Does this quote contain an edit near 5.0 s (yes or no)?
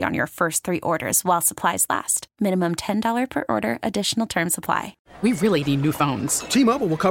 yes